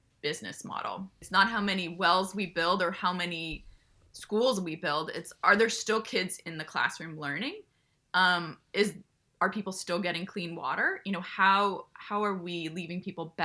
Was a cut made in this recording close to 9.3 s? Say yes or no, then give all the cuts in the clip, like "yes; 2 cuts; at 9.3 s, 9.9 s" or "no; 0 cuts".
no; 1 cut; at 1.2 s